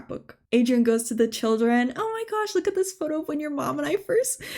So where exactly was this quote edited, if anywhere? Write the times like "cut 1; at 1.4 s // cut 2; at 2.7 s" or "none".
none